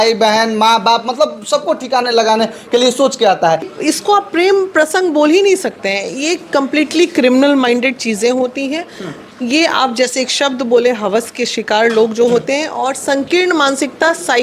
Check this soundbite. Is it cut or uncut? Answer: cut